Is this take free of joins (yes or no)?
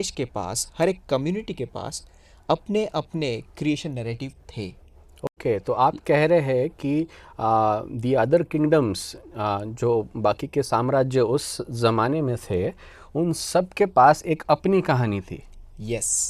yes